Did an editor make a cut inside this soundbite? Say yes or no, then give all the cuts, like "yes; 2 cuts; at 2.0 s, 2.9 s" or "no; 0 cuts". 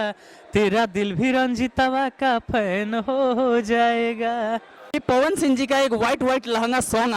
yes; 1 cut; at 5.0 s